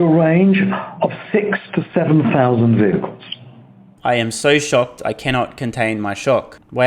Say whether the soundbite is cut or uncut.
uncut